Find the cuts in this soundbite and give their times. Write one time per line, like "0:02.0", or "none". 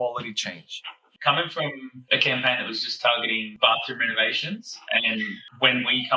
0:01.1
0:01.9
0:03.5